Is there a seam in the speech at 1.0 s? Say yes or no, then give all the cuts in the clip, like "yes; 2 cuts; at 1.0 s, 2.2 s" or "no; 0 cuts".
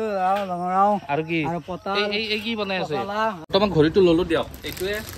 no; 1 cut; at 3.4 s